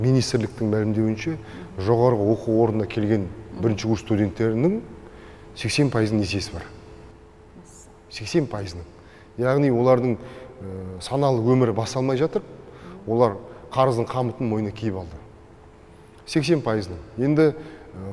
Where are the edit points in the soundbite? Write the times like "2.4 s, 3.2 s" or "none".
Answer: none